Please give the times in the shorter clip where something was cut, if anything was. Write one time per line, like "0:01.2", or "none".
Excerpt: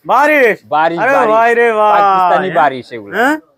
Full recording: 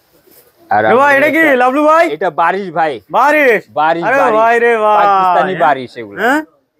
none